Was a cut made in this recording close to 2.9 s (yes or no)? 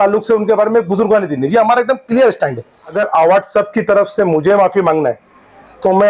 yes